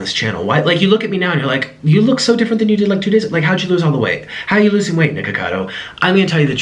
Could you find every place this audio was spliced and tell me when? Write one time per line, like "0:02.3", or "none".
none